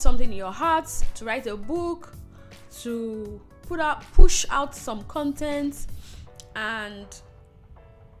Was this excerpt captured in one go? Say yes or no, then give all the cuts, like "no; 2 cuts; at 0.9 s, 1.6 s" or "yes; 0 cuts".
yes; 0 cuts